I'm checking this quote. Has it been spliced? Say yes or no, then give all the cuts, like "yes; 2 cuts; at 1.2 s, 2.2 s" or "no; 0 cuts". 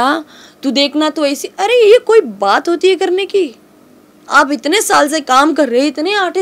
no; 0 cuts